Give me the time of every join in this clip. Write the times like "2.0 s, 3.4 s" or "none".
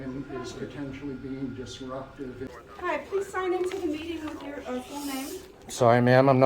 2.5 s